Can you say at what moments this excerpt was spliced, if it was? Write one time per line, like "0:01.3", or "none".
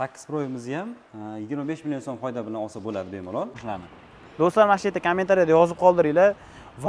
0:03.5

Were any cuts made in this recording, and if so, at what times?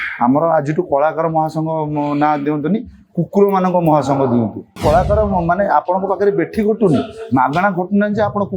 0:04.8

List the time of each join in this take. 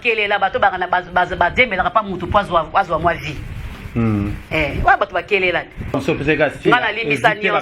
0:05.9

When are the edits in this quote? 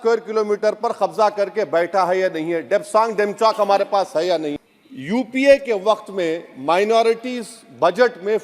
0:04.6

